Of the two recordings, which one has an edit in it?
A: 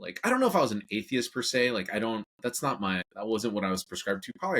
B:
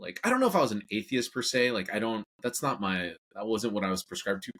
A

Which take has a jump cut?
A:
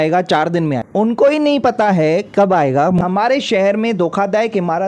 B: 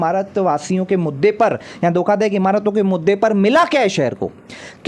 A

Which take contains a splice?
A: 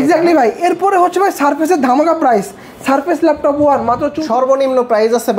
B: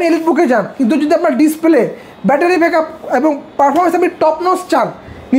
A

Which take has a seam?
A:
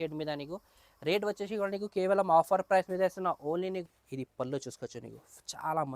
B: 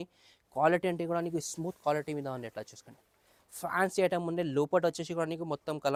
A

